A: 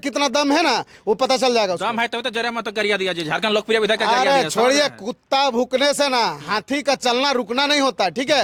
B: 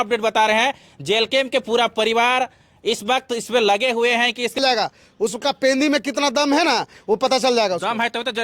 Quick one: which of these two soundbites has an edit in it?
B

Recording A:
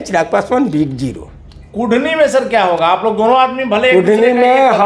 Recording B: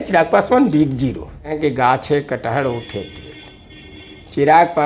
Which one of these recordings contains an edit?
B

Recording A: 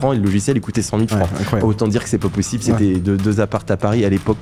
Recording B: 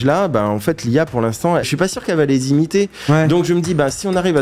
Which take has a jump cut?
B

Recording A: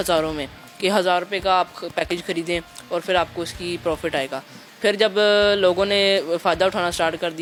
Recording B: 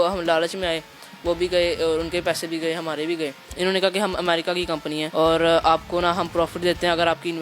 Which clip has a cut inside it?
B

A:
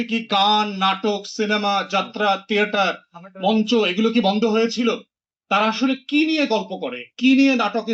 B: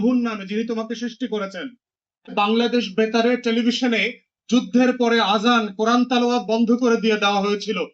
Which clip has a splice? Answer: B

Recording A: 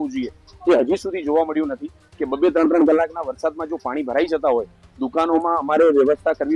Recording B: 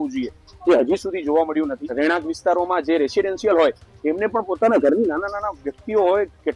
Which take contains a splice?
B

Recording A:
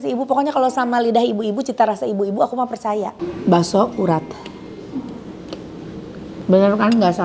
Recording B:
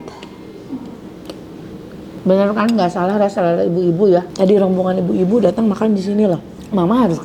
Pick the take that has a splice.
A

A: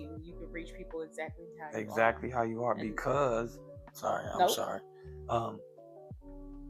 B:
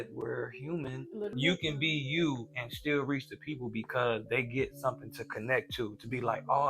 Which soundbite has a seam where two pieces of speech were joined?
B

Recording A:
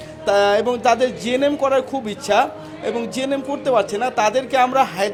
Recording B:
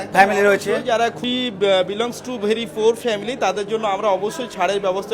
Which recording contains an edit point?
B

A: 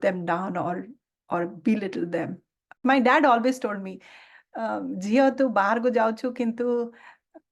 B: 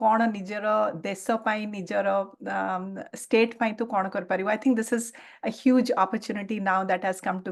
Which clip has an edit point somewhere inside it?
A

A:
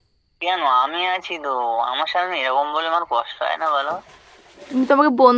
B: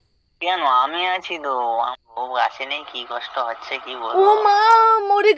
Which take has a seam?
B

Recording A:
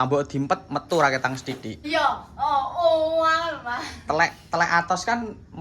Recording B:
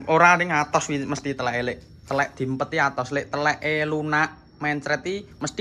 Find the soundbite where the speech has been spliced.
A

